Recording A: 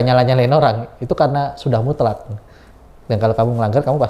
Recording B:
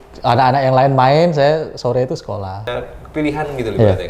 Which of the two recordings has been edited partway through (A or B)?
B